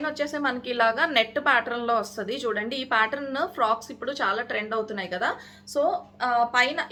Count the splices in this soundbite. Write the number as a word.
zero